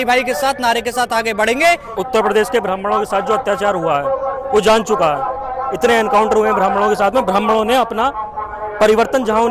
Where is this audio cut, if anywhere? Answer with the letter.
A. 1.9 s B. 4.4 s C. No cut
A